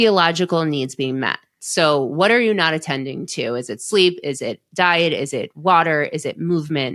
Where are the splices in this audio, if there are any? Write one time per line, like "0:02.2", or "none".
0:01.5